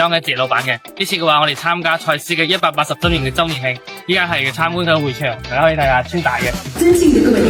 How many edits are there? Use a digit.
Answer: 0